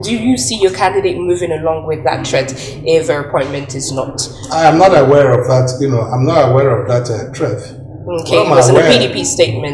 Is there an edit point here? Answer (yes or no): no